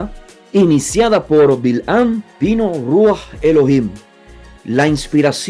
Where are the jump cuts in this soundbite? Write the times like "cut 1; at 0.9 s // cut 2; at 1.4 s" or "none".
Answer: cut 1; at 2.3 s